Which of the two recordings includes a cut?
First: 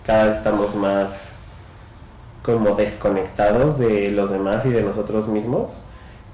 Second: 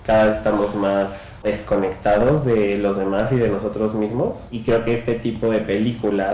second; 2 cuts; at 1.4 s, 4.5 s

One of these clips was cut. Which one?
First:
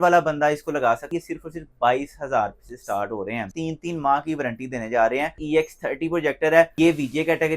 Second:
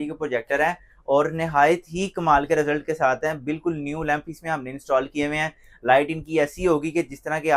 first; 4 cuts; at 1.1 s, 3.5 s, 5.4 s, 6.7 s

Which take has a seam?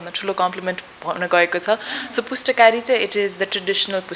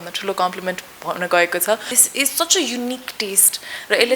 second; 1 cut; at 2.0 s

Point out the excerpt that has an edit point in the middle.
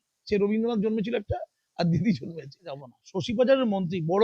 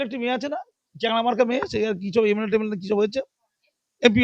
first; 1 cut; at 2.8 s

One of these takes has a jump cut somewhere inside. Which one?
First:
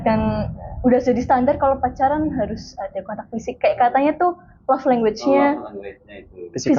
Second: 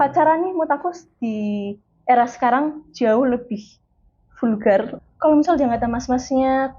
second; 1 cut; at 4.9 s

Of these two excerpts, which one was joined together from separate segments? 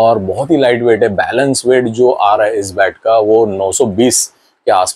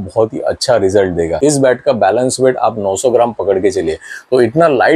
second; 1 cut; at 1.3 s

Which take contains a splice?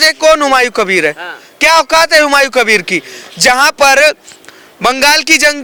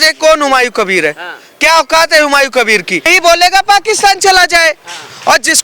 second; 1 cut; at 3.1 s

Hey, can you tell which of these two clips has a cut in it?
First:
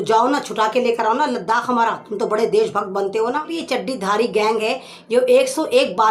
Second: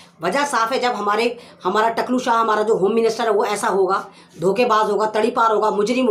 first; 1 cut; at 3.6 s

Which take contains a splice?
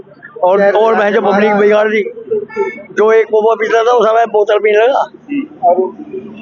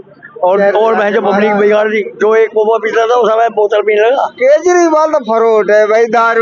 second; 2 cuts; at 2.1 s, 4.3 s

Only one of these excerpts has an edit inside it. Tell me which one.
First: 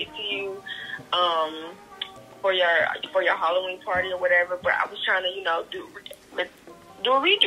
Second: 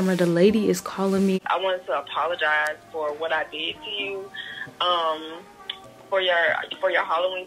second; 1 cut; at 1.4 s

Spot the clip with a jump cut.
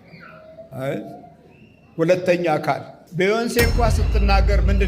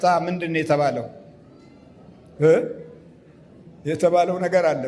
first; 1 cut; at 3.0 s

